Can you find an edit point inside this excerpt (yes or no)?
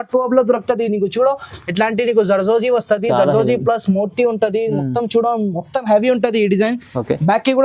no